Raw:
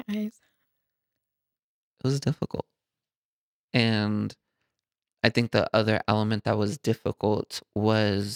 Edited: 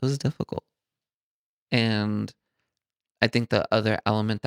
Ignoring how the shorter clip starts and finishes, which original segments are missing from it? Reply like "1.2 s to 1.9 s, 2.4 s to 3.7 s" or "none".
none